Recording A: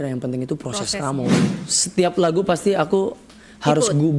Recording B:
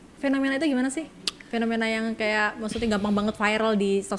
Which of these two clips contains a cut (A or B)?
A